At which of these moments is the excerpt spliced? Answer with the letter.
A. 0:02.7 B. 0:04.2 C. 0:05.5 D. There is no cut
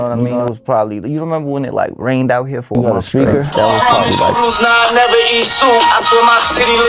A